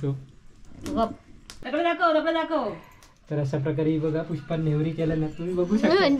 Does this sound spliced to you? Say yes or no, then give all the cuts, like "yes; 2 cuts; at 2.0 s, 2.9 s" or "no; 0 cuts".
yes; 1 cut; at 1.5 s